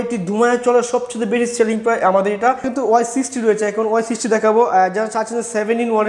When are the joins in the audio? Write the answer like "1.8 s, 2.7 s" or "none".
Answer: 2.7 s